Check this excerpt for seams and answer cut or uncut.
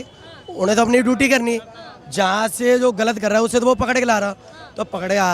uncut